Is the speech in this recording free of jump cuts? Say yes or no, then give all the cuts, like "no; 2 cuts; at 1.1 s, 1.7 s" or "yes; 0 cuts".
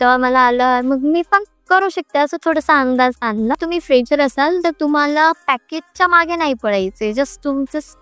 no; 1 cut; at 3.6 s